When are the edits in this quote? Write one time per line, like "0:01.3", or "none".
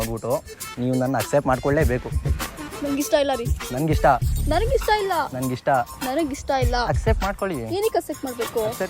none